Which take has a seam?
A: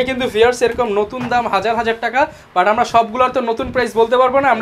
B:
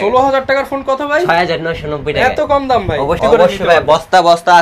B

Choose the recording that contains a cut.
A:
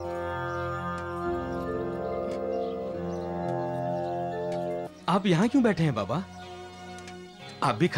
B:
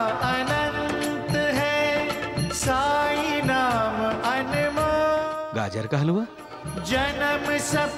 A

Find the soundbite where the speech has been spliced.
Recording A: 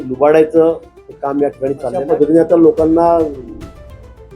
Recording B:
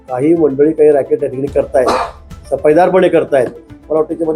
A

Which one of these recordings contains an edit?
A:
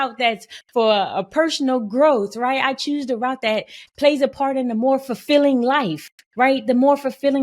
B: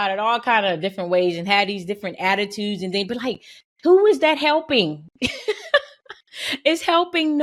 A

